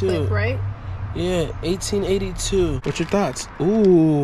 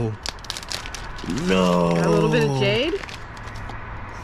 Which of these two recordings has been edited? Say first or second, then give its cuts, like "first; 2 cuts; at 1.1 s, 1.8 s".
first; 1 cut; at 2.8 s